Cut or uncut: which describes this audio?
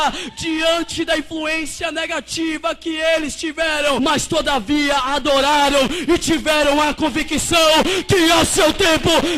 cut